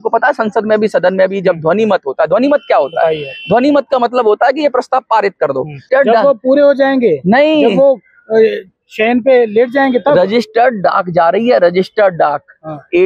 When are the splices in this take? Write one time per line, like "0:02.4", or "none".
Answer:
0:05.8